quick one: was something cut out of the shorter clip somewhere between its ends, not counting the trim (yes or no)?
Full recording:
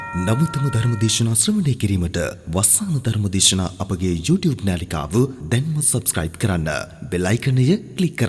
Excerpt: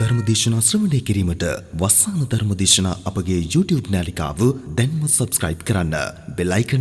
no